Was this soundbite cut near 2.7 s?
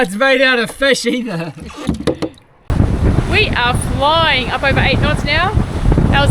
yes; 1 cut; at 2.7 s

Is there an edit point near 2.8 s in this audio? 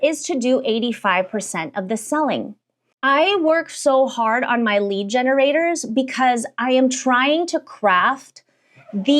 yes; 1 cut; at 2.8 s

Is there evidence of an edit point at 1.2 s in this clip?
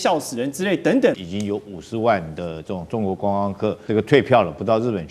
yes; 2 cuts; at 1.2 s, 3.8 s

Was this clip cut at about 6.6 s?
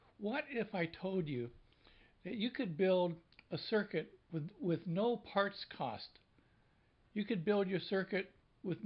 yes; 1 cut; at 6.6 s

